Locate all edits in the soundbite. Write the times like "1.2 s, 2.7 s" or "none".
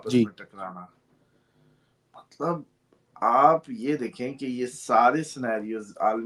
none